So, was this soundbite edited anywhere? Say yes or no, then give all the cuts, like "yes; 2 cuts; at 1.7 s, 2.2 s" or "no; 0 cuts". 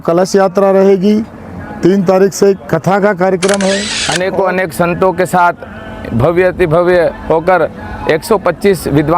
yes; 1 cut; at 4.0 s